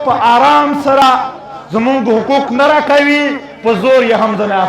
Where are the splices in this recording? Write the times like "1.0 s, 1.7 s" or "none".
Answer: 1.0 s